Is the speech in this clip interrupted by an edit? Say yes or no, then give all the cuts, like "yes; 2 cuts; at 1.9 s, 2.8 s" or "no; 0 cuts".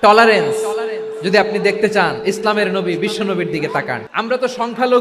yes; 1 cut; at 4.0 s